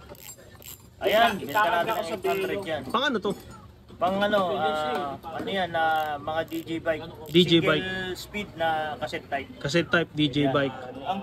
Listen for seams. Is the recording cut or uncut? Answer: uncut